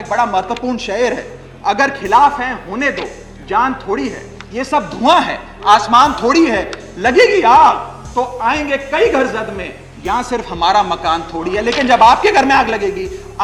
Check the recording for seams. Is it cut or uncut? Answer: uncut